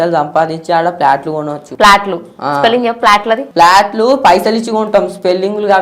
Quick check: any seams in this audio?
yes; 2 cuts; at 1.6 s, 3.5 s

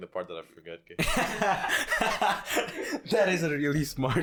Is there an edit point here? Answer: no; 0 cuts

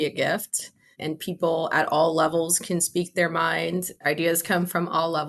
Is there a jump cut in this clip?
yes; 1 cut; at 4.0 s

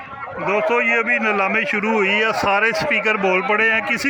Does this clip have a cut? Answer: no; 0 cuts

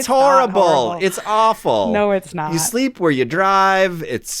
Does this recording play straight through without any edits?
no; 1 cut; at 2.3 s

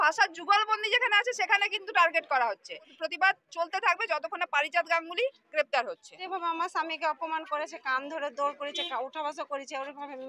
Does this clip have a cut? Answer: yes; 2 cuts; at 2.9 s, 6.2 s

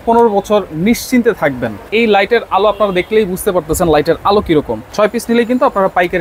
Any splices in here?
yes; 2 cuts; at 1.7 s, 4.8 s

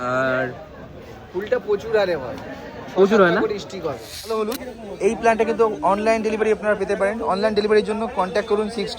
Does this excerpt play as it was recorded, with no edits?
no; 1 cut; at 4.4 s

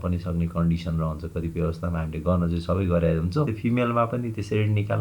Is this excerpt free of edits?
no; 1 cut; at 3.5 s

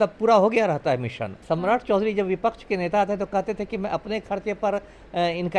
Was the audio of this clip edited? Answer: yes; 1 cut; at 1.4 s

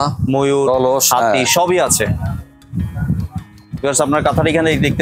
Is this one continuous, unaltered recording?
yes; 0 cuts

